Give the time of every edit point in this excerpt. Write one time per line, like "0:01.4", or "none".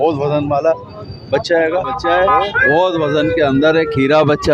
0:01.9